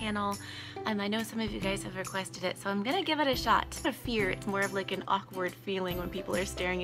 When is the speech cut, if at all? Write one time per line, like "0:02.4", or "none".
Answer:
none